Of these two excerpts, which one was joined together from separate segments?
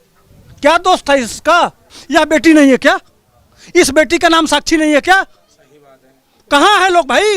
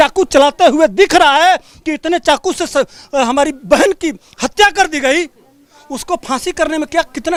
first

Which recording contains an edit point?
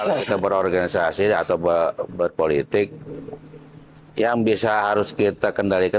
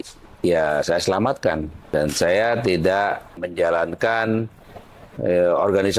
second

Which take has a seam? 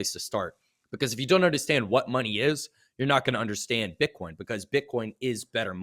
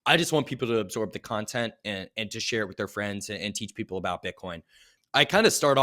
second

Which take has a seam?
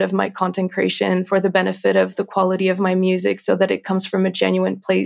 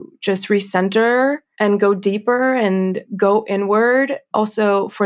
second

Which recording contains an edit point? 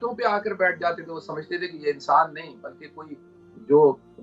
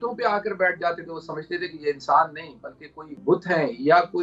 second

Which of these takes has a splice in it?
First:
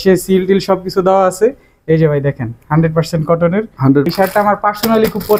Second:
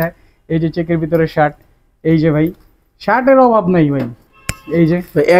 first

